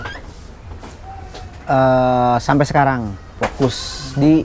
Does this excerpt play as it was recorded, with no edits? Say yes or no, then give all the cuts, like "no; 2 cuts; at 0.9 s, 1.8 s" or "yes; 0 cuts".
yes; 0 cuts